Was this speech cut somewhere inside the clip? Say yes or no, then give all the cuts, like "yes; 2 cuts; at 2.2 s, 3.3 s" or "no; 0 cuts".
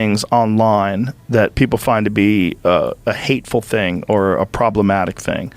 no; 0 cuts